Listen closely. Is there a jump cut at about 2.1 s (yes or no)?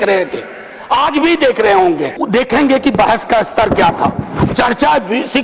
yes